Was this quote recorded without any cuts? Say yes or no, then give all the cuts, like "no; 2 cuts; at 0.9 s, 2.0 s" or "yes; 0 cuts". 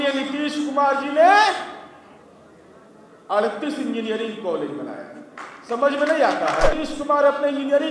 no; 1 cut; at 6.8 s